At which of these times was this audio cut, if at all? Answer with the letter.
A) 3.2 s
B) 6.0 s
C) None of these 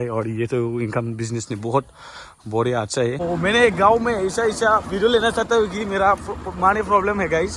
A